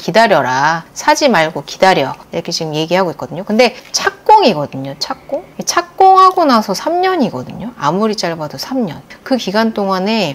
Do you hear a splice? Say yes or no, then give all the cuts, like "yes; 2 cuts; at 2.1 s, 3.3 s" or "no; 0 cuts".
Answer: yes; 1 cut; at 9.1 s